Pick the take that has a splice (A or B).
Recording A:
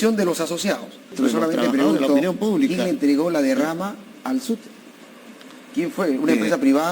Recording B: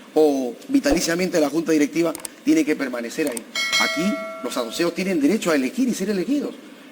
A